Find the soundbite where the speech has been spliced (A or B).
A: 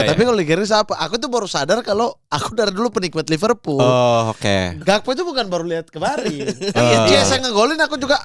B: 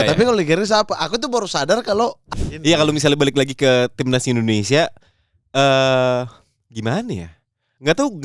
B